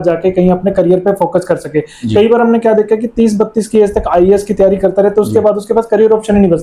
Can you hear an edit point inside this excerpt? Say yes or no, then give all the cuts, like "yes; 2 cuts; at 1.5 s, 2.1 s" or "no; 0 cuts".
no; 0 cuts